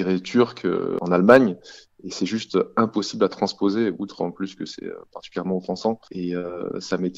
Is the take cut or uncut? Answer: cut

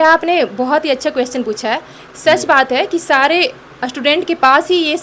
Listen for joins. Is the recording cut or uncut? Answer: uncut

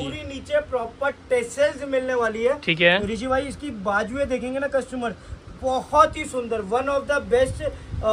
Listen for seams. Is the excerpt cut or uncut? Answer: uncut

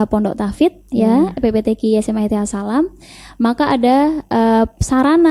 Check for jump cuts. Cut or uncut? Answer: uncut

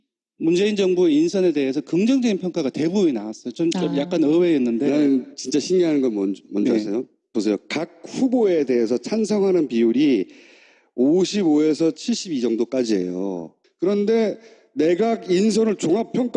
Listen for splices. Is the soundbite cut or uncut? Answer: uncut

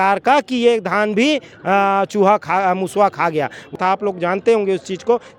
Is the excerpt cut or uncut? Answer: cut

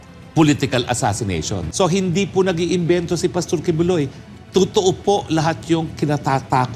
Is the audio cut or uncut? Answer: cut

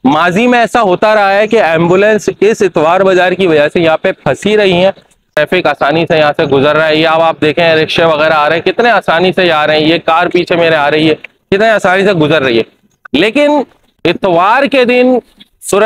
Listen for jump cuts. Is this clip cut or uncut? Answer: cut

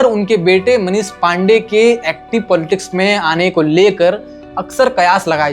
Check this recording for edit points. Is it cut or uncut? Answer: uncut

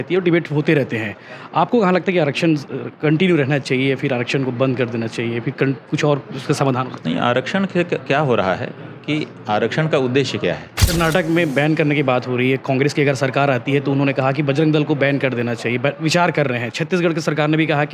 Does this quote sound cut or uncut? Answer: cut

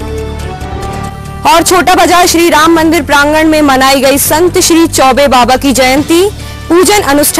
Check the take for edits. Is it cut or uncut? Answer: uncut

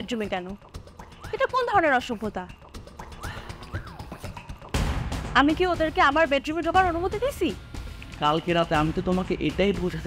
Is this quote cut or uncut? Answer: uncut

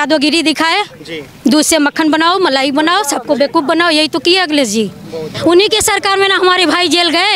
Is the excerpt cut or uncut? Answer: cut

